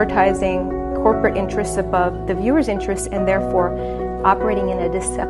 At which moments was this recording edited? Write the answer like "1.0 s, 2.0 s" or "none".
none